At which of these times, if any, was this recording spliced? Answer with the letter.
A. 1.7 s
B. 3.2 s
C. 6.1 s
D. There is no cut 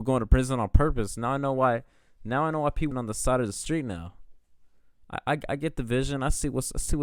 D